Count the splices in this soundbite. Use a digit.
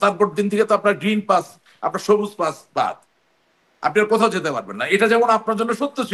0